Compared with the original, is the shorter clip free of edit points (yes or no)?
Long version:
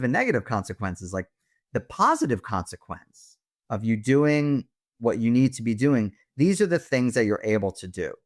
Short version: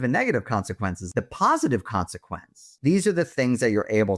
no